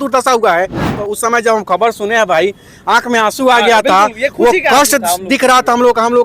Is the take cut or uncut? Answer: cut